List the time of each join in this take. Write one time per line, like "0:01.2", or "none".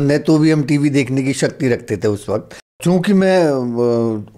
0:02.8